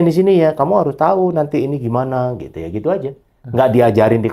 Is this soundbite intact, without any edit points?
yes; 0 cuts

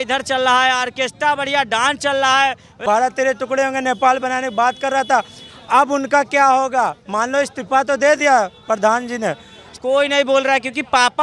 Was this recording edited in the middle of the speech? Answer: yes; 2 cuts; at 2.8 s, 9.7 s

